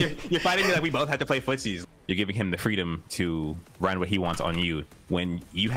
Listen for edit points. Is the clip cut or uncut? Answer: cut